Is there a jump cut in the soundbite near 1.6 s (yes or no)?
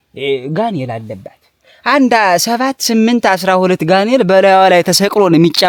no